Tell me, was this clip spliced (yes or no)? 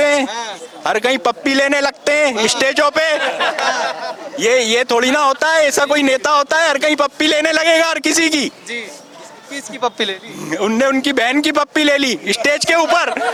no